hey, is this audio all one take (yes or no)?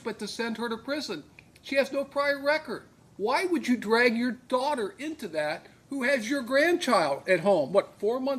yes